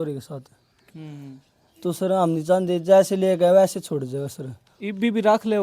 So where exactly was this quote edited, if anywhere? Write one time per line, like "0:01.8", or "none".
0:00.9